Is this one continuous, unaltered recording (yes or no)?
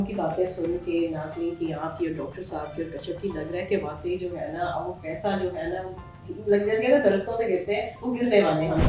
yes